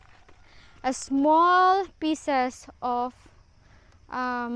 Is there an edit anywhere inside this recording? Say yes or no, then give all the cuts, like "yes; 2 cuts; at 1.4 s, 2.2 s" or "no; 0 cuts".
no; 0 cuts